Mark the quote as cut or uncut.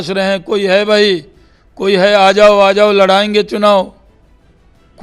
uncut